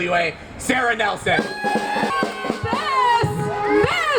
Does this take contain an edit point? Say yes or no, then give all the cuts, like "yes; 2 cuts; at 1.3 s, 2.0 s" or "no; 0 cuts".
yes; 1 cut; at 2.1 s